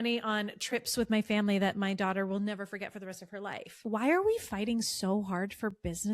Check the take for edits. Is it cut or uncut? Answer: cut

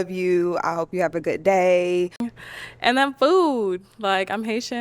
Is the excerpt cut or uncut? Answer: cut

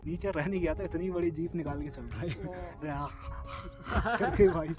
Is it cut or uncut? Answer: uncut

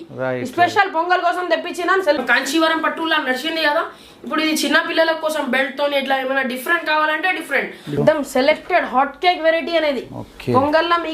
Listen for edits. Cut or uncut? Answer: cut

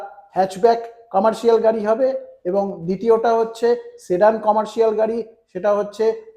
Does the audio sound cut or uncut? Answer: uncut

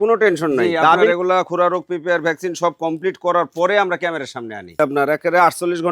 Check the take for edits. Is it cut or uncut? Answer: cut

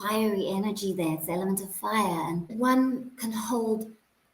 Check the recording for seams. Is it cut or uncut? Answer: cut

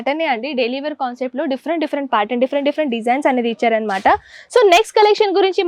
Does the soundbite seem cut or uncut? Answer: uncut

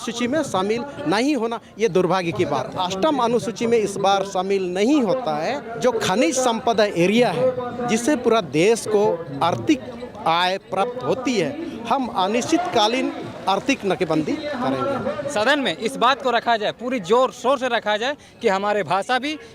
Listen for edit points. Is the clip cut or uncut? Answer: cut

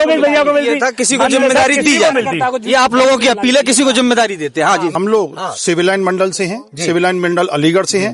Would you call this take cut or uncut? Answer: cut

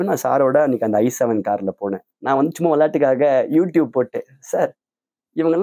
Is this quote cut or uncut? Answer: cut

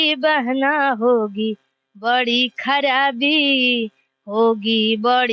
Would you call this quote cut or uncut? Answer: uncut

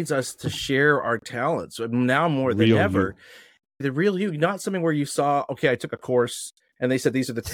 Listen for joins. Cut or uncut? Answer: cut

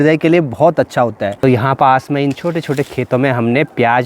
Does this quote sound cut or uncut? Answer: cut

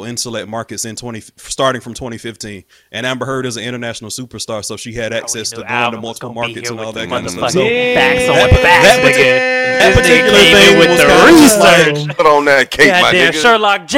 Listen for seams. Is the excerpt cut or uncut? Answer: uncut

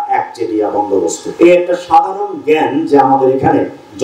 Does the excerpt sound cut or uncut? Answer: cut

